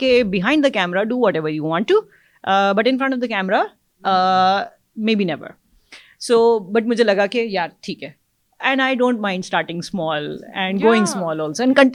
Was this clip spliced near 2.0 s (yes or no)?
no